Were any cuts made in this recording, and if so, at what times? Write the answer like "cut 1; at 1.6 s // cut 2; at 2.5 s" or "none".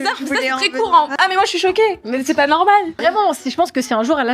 cut 1; at 1.1 s // cut 2; at 3.0 s

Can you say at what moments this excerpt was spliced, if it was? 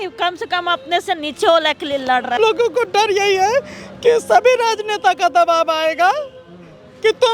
cut 1; at 2.4 s

